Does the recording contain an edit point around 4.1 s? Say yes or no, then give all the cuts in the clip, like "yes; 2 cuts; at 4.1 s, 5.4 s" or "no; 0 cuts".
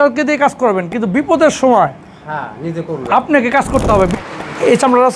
yes; 1 cut; at 4.1 s